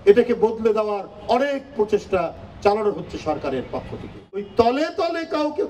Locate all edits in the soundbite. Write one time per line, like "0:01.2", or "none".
0:04.5